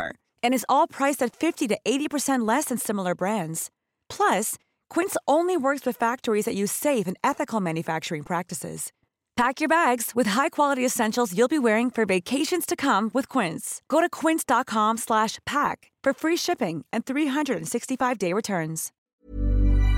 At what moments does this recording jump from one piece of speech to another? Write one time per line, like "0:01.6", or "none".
0:18.9

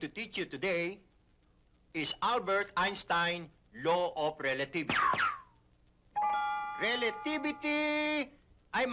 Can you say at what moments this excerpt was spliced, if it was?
none

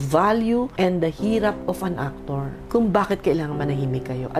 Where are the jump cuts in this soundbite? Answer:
none

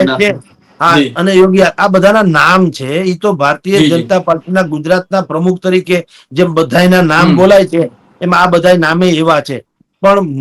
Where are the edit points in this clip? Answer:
none

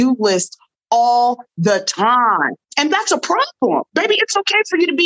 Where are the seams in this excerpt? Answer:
0:02.5
0:03.9

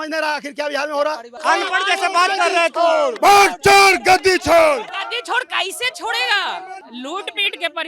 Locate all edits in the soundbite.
0:01.3
0:03.1
0:04.9
0:06.8

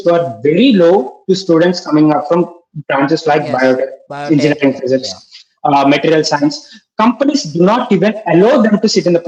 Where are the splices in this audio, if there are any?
none

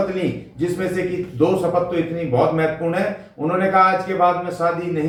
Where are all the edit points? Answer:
none

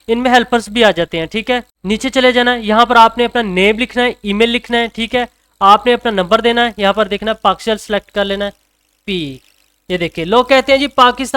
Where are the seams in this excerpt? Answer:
0:01.7

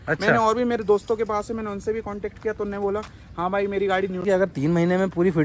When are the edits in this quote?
0:04.2

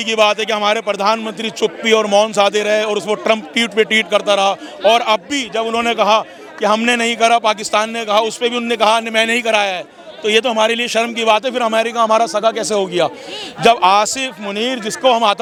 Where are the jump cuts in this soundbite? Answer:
none

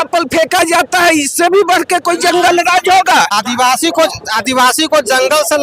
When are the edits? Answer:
0:03.3

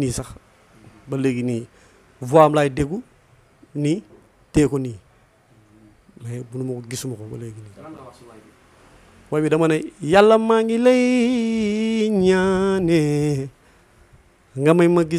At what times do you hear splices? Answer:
none

